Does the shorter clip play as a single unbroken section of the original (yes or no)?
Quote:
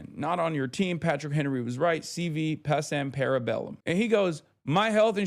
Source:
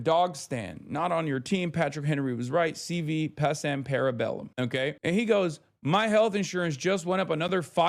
no